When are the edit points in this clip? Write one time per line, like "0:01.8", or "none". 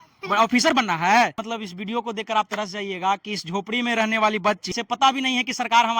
0:01.4
0:04.6